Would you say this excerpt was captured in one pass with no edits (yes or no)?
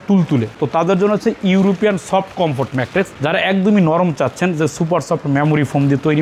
yes